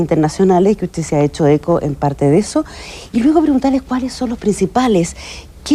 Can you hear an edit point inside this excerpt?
no; 0 cuts

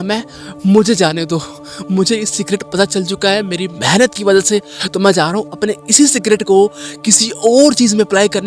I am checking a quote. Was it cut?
no; 0 cuts

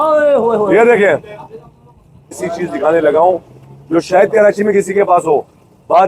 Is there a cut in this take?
yes; 1 cut; at 2.4 s

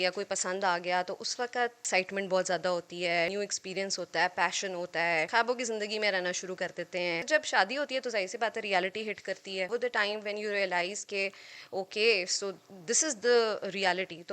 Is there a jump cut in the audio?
yes; 5 cuts; at 1.8 s, 3.3 s, 5.3 s, 7.3 s, 9.7 s

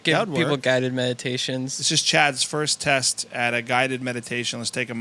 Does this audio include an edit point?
yes; 1 cut; at 1.8 s

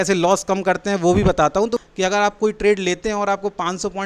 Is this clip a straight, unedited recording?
no; 1 cut; at 1.8 s

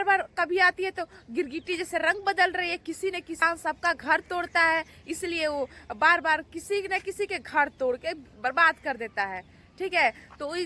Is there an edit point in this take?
yes; 1 cut; at 3.4 s

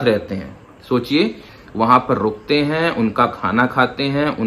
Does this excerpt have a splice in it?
yes; 1 cut; at 1.5 s

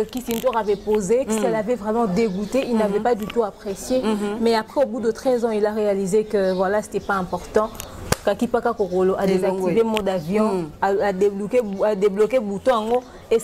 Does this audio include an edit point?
no; 0 cuts

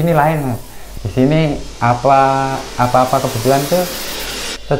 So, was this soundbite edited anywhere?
no; 0 cuts

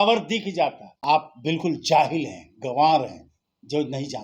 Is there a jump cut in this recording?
yes; 1 cut; at 0.9 s

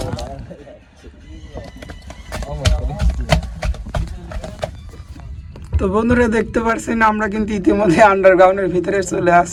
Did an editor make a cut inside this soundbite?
no; 0 cuts

